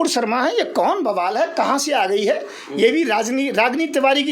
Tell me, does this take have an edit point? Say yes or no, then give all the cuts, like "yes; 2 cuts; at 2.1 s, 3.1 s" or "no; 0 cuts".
no; 0 cuts